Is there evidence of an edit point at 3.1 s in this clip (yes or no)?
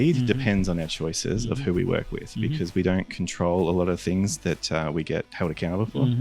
no